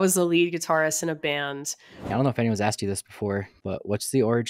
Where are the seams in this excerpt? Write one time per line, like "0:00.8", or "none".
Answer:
0:02.1
0:03.5